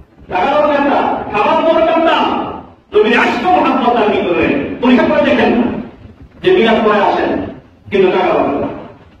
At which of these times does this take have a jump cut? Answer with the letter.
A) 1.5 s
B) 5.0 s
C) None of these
B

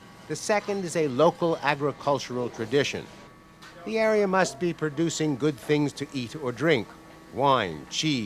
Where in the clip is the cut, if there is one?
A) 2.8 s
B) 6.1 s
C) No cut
B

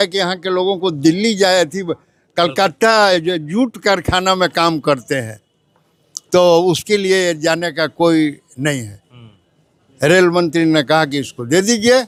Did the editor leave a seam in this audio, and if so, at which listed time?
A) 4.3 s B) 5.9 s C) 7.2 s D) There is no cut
D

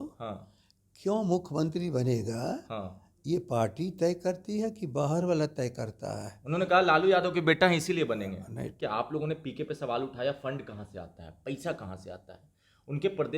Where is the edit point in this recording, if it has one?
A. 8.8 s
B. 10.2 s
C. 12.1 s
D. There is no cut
A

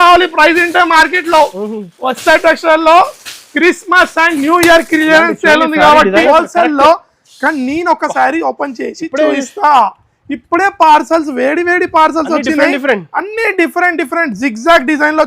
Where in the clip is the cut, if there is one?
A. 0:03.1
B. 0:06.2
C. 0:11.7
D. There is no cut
B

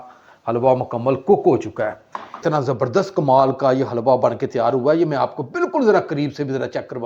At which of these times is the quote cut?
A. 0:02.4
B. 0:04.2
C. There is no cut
A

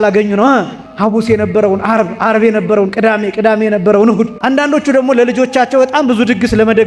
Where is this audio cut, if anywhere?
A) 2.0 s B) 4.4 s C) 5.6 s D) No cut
B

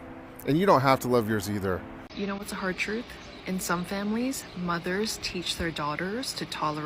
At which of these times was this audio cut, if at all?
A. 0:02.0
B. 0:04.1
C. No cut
A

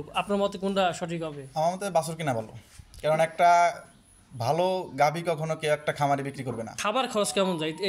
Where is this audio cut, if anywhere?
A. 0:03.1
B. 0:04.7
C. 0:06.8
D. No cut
C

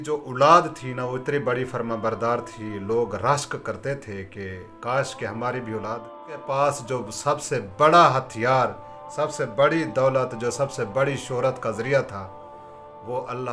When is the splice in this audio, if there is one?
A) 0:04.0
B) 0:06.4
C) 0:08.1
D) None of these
B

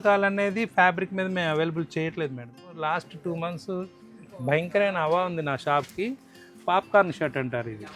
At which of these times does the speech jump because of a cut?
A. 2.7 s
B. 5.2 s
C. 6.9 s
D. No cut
A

